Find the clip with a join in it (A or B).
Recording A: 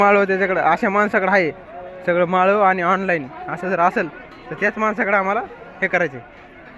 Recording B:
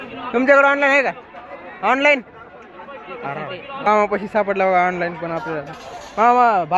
B